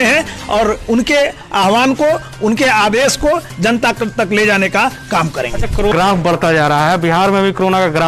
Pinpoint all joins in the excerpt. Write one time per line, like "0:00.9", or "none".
0:05.9